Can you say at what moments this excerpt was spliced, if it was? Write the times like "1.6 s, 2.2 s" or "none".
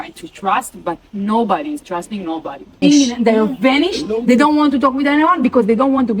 2.8 s